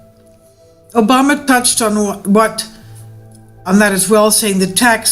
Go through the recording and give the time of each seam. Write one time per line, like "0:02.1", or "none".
0:01.7